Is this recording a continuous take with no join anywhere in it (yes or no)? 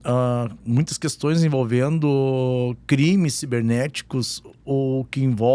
yes